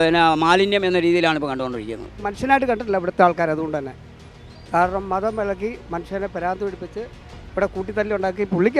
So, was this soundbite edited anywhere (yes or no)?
yes